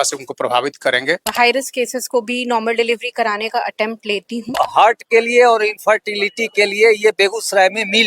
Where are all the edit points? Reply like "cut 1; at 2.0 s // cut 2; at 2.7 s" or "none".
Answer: cut 1; at 1.3 s // cut 2; at 4.5 s